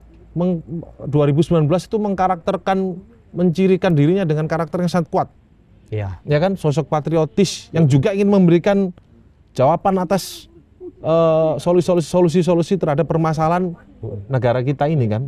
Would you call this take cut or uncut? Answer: uncut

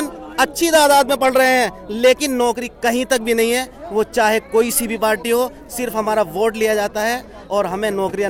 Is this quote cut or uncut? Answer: uncut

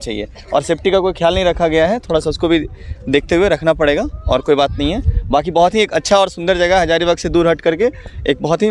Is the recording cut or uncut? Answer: uncut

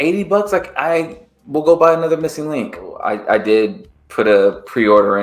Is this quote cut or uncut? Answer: cut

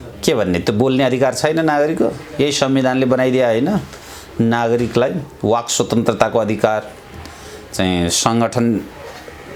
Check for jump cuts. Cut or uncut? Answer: uncut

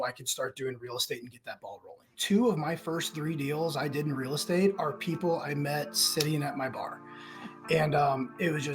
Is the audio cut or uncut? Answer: cut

